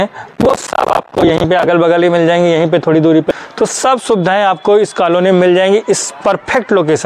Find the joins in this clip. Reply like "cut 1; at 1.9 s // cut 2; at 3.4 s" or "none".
cut 1; at 3.3 s